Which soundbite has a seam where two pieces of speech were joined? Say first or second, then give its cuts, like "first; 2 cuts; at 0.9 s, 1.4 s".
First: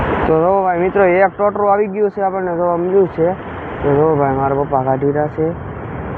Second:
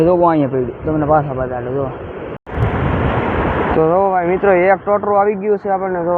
second; 1 cut; at 2.4 s